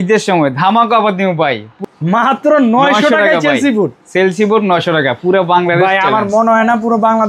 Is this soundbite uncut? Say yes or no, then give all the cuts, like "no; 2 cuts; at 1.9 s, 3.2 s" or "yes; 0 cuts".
no; 1 cut; at 1.7 s